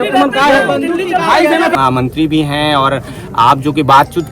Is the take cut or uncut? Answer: cut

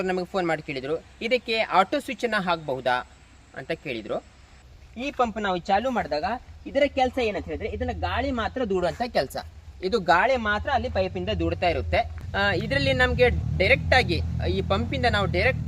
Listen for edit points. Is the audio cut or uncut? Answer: cut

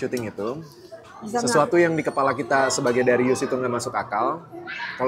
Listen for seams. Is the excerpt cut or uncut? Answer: uncut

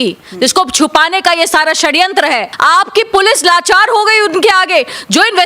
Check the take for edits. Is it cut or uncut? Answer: cut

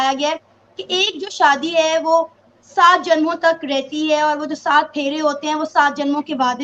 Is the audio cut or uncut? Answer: uncut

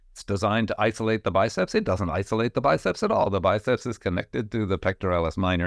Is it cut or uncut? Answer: uncut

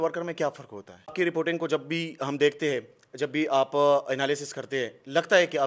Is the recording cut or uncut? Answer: cut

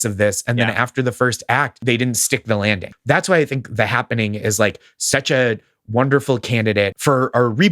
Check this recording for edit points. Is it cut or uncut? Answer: cut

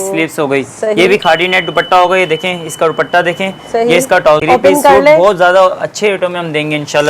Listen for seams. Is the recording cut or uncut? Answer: cut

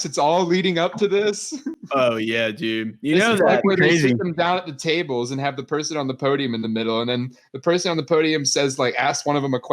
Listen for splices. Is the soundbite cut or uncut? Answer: uncut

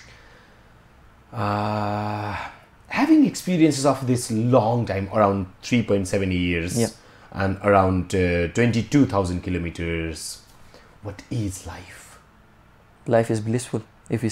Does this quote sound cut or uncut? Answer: uncut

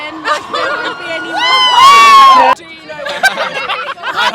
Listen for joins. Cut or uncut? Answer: cut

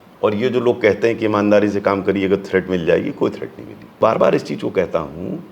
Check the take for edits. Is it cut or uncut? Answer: cut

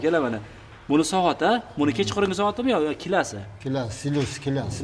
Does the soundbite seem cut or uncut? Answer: uncut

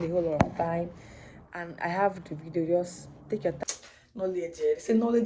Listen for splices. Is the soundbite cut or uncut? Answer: cut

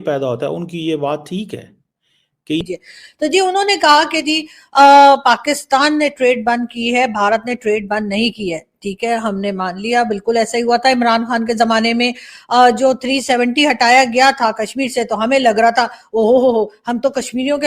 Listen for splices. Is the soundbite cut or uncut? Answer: cut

